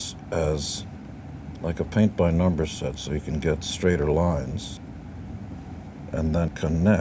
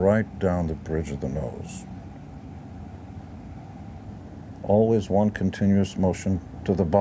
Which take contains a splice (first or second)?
second